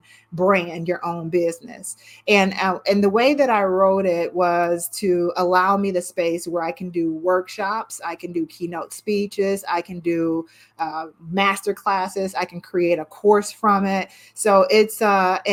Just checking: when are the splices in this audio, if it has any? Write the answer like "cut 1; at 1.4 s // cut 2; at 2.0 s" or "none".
none